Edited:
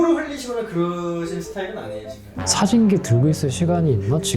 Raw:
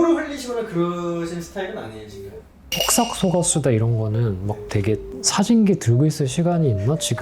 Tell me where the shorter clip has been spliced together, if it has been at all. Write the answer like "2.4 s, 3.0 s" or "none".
2.4 s